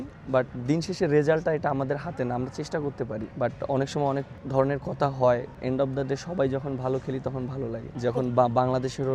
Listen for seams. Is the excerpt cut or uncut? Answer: cut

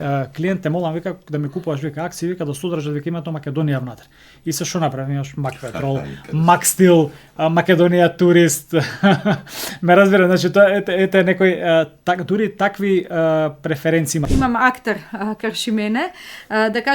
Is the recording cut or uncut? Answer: cut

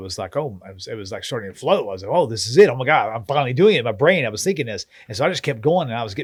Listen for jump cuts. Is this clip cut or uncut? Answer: uncut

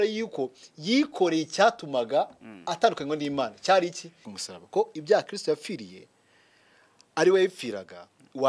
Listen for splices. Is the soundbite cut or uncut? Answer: cut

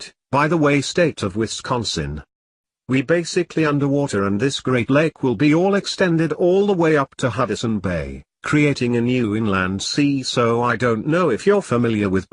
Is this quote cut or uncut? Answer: uncut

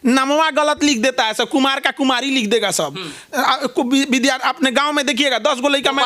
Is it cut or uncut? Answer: uncut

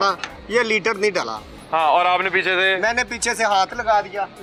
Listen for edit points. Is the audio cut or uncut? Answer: uncut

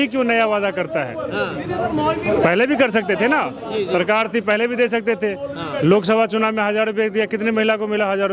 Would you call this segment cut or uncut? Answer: uncut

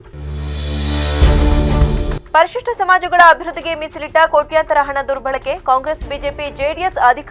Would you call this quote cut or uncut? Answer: uncut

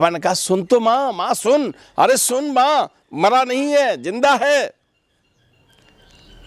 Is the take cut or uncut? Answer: uncut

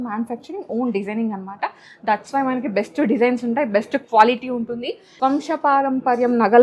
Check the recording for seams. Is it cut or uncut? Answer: cut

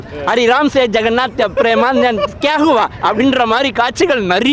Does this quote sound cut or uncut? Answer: uncut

